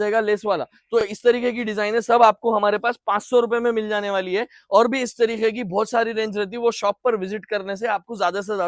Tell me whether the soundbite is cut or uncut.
uncut